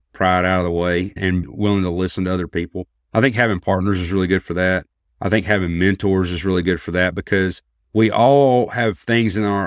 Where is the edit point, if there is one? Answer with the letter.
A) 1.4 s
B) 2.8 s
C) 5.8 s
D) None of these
A